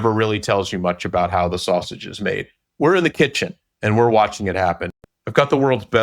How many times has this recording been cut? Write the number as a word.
one